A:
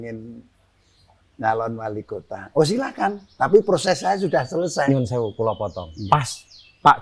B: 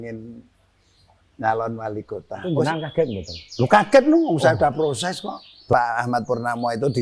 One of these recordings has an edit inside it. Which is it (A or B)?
B